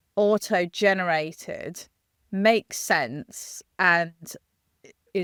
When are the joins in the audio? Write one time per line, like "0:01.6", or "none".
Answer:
none